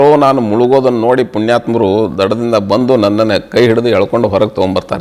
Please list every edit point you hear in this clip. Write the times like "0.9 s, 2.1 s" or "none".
none